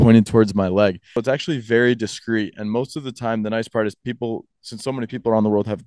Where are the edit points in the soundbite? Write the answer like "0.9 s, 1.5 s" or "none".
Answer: 1.2 s

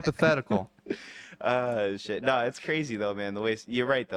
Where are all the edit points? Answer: none

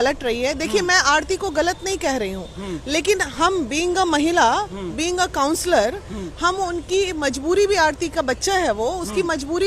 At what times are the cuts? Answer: none

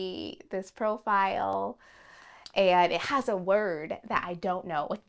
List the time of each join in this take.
none

